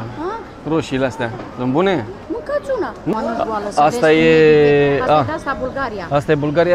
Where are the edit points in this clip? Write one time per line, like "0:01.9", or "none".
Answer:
0:03.1